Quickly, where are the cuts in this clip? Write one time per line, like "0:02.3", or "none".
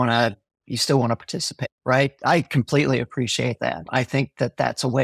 0:02.1
0:03.9

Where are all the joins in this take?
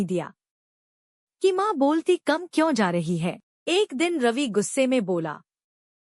0:03.5

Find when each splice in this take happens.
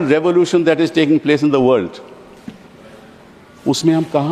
none

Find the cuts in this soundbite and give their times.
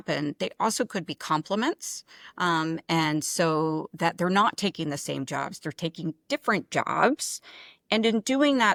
none

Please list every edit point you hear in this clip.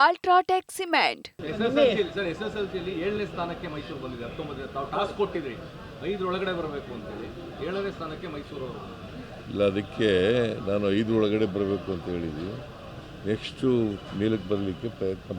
0:01.2

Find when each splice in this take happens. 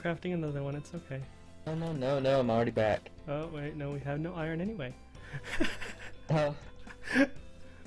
0:02.4

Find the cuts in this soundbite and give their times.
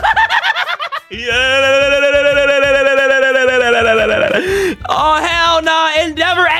none

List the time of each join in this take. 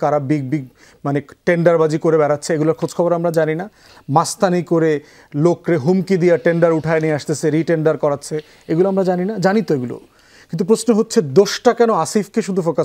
none

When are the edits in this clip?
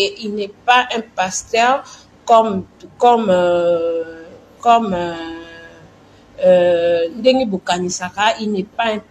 none

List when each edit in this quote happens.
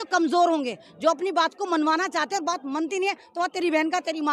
none

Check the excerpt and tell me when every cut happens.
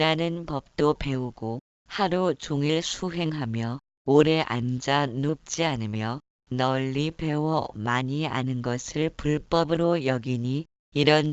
0:10.4

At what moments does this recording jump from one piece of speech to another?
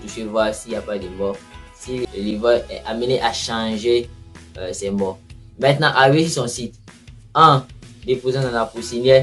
0:02.0

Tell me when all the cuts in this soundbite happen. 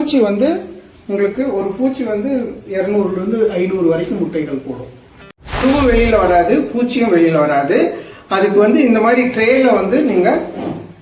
0:05.2

